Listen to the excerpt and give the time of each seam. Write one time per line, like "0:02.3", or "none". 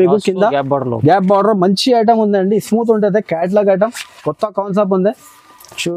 none